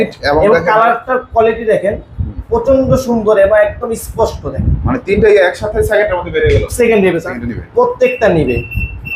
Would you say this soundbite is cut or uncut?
cut